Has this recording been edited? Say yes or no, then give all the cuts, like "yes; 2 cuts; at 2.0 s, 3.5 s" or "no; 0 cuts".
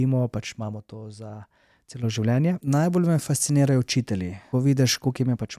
yes; 2 cuts; at 2.6 s, 4.4 s